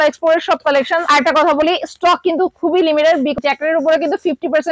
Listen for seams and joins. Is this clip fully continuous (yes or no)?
no